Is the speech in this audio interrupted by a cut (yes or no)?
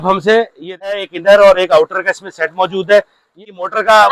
yes